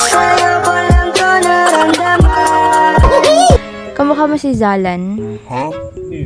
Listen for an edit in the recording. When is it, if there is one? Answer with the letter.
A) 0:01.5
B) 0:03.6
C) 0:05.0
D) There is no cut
B